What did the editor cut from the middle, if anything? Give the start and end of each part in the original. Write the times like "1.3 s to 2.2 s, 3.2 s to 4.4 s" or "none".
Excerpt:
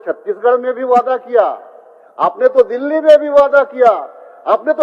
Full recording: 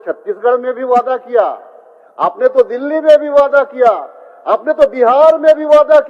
none